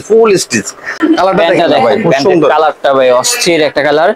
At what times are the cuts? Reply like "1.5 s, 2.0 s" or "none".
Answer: 0.9 s